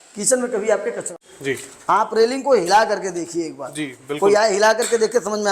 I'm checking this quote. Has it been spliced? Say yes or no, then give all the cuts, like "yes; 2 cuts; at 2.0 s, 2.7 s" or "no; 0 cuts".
yes; 1 cut; at 1.1 s